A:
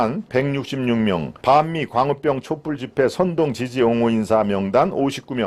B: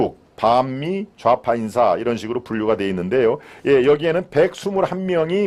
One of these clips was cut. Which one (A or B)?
A